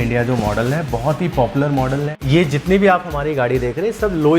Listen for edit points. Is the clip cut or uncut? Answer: cut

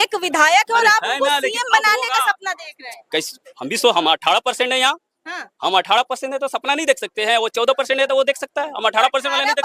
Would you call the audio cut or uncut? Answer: uncut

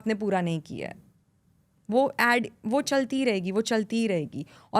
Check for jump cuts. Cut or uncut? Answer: uncut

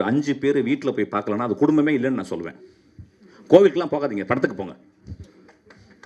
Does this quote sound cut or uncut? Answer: uncut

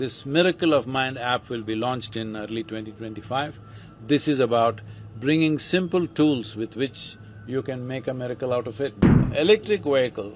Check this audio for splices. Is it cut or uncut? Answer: cut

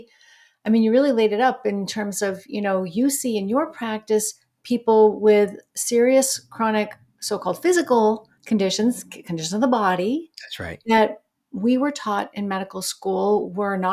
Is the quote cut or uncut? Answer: uncut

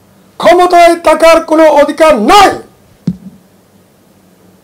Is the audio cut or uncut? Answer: uncut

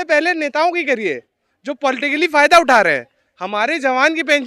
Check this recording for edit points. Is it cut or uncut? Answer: uncut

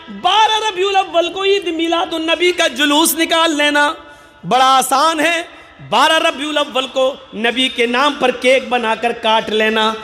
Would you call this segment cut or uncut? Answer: uncut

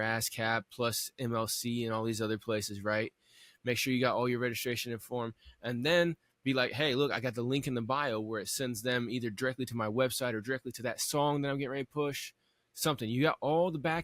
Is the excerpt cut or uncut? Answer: uncut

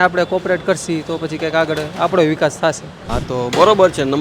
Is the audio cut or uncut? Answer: cut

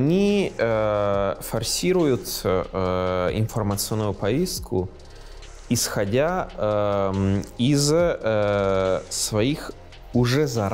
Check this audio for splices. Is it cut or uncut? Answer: uncut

